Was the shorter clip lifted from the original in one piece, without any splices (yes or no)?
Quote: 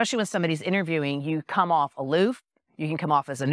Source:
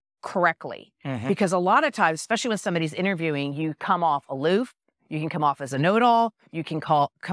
yes